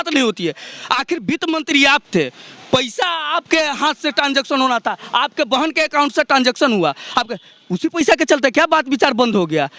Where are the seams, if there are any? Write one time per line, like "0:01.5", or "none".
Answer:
none

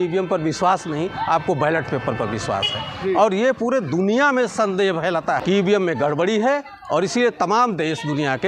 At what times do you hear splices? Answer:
0:05.4

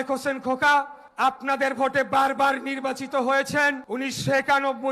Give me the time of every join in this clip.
0:01.0
0:03.8

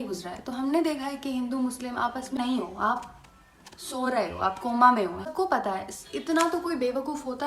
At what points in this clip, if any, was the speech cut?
0:02.4
0:05.3

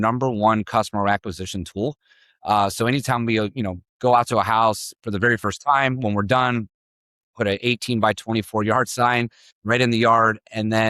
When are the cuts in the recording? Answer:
none

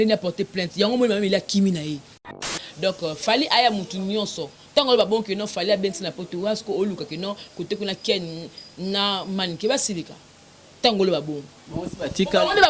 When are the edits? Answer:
0:02.5

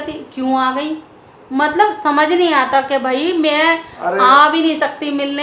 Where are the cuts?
none

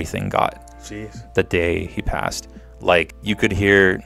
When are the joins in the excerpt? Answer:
0:03.2

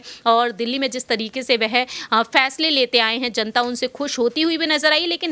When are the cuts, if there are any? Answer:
none

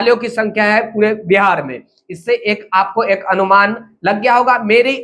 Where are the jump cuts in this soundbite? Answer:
none

